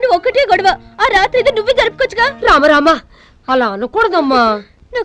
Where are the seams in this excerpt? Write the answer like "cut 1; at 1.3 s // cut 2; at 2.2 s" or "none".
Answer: none